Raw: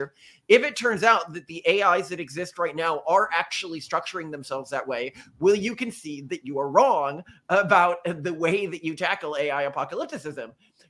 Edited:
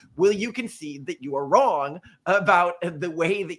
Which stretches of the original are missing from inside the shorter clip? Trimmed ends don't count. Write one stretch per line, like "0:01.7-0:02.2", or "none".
none